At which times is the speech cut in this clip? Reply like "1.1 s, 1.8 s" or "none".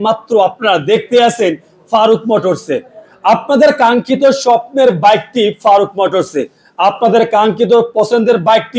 none